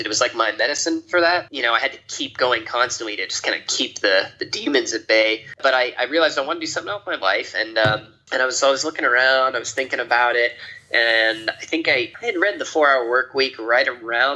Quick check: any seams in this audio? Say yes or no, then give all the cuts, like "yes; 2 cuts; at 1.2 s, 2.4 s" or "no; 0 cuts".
yes; 3 cuts; at 1.5 s, 5.5 s, 12.1 s